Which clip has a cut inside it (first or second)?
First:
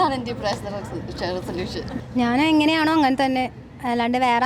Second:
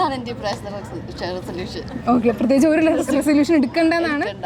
first